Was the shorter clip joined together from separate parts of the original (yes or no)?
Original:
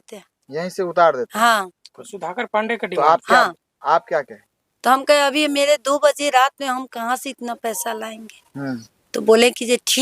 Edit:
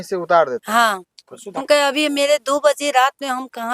yes